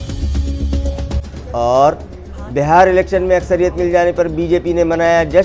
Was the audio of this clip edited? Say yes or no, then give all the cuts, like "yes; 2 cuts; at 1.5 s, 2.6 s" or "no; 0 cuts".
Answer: yes; 1 cut; at 1.1 s